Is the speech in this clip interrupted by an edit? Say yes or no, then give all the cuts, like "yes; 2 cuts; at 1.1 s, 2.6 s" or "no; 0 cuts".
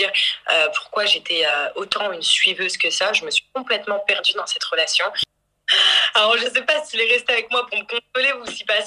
yes; 1 cut; at 5.2 s